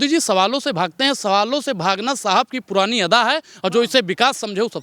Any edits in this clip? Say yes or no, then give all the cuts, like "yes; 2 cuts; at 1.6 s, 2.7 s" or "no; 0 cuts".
no; 0 cuts